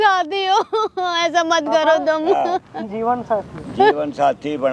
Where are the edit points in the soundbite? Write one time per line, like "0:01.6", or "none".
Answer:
none